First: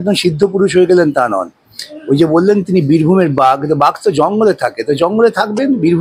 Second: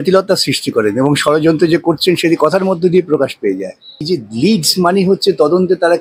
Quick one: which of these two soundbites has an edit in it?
second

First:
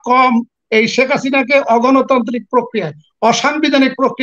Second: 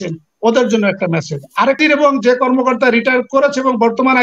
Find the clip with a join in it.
second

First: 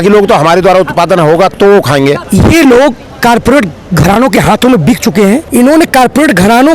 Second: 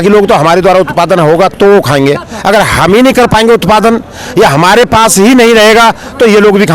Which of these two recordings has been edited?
first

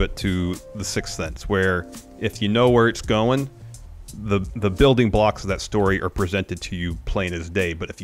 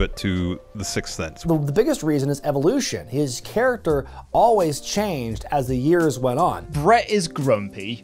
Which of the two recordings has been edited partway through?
second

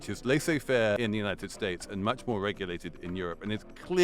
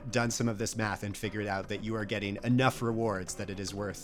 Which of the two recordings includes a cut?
first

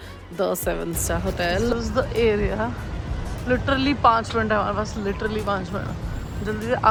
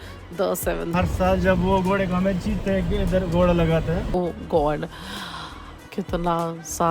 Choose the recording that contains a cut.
second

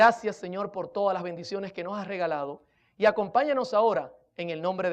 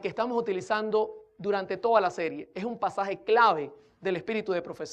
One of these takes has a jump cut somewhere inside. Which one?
first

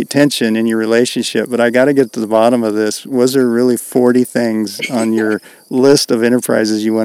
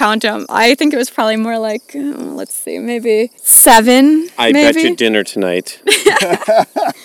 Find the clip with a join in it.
second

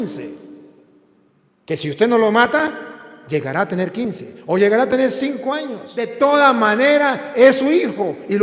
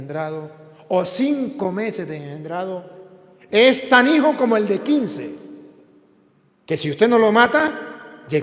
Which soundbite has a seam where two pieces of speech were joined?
first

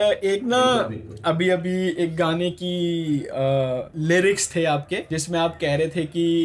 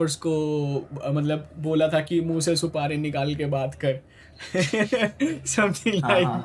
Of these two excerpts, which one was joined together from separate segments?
first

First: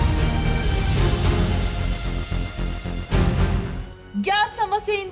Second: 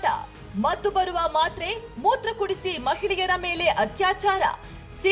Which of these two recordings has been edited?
first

